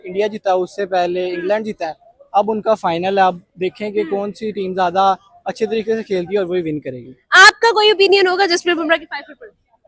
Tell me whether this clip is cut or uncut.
uncut